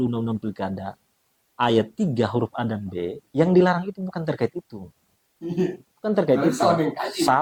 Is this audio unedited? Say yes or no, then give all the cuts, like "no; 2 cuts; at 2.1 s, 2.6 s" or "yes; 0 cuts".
yes; 0 cuts